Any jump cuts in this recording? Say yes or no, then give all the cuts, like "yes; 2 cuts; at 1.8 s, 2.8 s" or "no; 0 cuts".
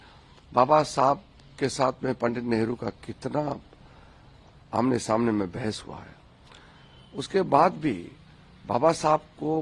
no; 0 cuts